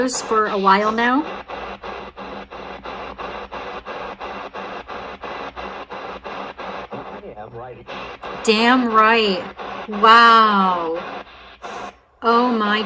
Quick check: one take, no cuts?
yes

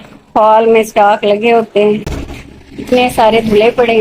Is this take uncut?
yes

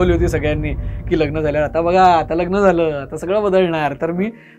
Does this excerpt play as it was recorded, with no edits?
yes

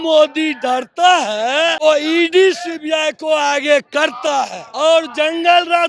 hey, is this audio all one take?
no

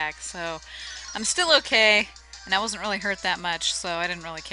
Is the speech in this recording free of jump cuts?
no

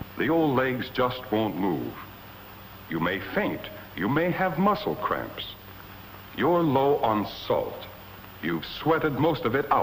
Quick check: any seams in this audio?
no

